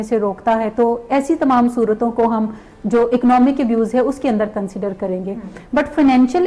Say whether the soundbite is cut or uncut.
uncut